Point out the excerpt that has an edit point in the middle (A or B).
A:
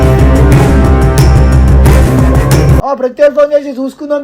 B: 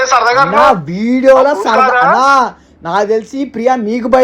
A